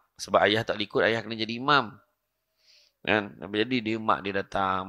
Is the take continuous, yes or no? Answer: yes